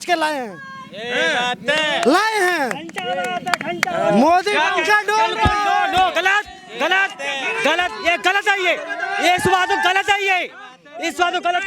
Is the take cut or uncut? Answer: uncut